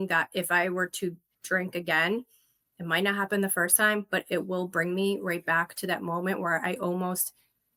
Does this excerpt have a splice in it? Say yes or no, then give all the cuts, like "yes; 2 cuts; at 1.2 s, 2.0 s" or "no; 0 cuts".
no; 0 cuts